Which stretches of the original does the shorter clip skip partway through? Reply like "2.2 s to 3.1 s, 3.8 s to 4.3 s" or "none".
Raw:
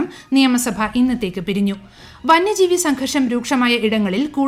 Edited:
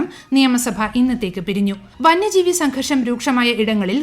1.9 s to 2.1 s

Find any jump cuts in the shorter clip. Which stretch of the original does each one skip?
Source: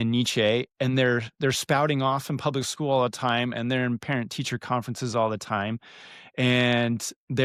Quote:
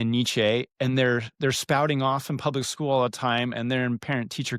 none

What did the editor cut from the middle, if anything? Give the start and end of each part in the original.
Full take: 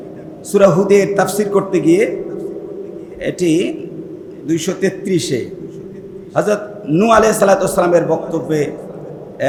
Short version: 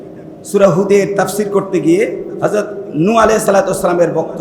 2.3 s to 6.2 s

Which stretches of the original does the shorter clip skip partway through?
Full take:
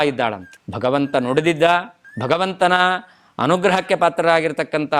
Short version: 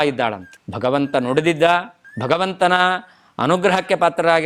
none

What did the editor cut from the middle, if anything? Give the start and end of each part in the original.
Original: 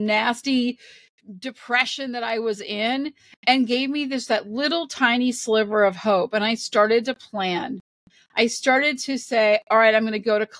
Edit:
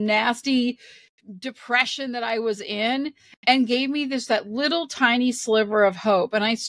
none

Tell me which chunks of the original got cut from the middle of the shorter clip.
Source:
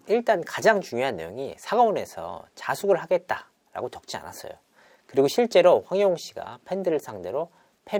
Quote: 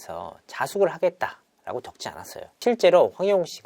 4.7 s to 5.3 s

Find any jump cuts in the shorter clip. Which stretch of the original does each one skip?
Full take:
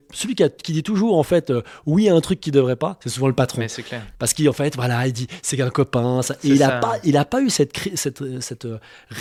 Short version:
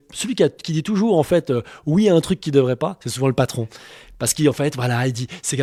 none

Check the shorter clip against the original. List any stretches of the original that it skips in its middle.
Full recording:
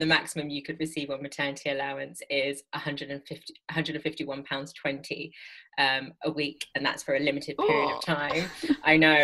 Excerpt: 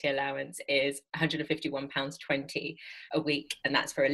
2.6 s to 3.6 s, 5.6 s to 6.1 s

